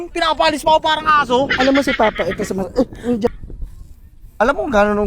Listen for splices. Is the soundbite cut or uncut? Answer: cut